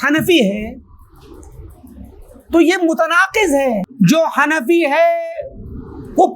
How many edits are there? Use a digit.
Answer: 1